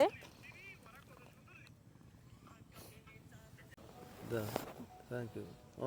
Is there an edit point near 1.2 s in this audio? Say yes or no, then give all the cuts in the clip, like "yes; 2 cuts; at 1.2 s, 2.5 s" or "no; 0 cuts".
no; 1 cut; at 3.7 s